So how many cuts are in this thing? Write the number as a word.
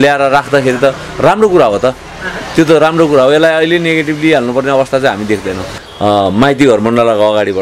one